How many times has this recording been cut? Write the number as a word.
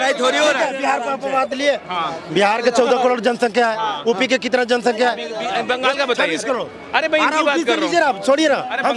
zero